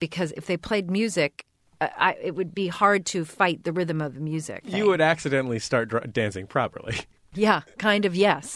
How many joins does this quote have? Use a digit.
3